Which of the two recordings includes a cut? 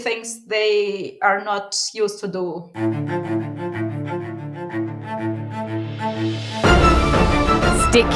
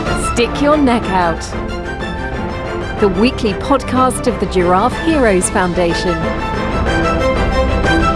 first; 1 cut; at 2.7 s

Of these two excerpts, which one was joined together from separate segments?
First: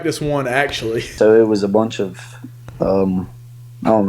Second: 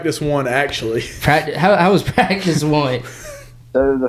first; 1 cut; at 1.1 s

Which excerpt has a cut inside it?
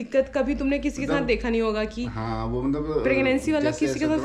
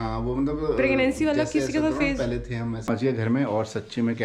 second; 1 cut; at 2.9 s

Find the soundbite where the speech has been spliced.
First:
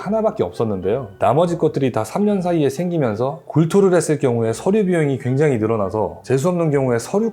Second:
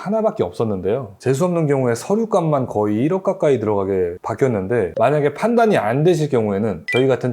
second; 2 cuts; at 1.1 s, 4.9 s

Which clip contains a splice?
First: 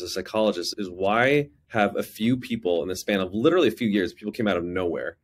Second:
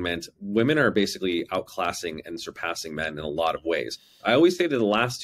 second; 1 cut; at 4.1 s

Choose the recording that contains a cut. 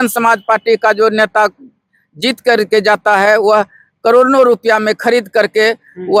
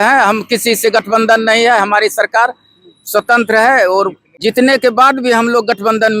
second; 1 cut; at 4.2 s

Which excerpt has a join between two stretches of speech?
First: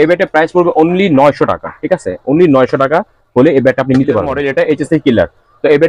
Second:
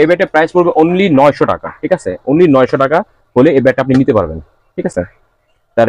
first; 1 cut; at 4.4 s

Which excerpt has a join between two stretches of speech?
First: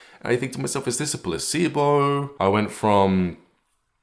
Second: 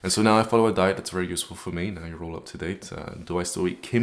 first; 1 cut; at 2.3 s

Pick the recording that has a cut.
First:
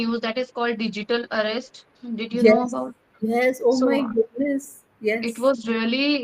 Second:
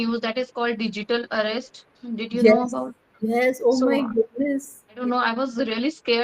second; 1 cut; at 4.9 s

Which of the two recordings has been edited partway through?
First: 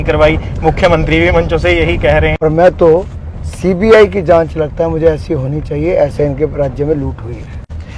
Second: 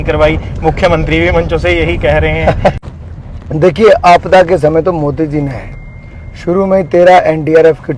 first; 1 cut; at 2.3 s

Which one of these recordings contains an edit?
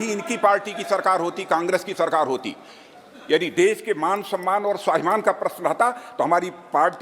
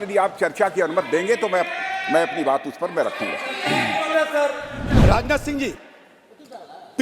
second; 1 cut; at 4.8 s

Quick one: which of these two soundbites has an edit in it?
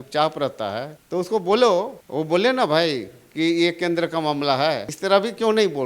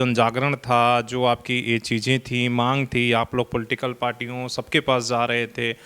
first; 3 cuts; at 0.9 s, 2.0 s, 4.9 s

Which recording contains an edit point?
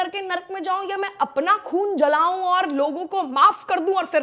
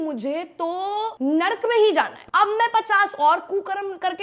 second; 2 cuts; at 1.1 s, 2.2 s

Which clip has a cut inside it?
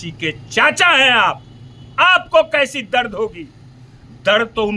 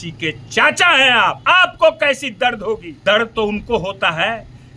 second; 2 cuts; at 1.4 s, 2.9 s

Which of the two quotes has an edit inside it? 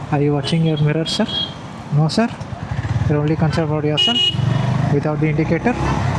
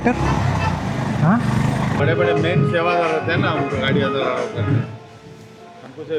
second; 1 cut; at 2.0 s

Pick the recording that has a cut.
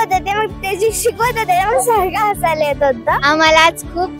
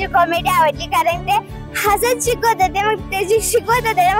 first; 1 cut; at 3.2 s

